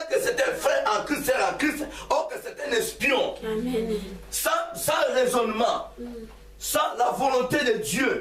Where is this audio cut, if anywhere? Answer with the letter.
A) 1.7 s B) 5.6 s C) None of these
C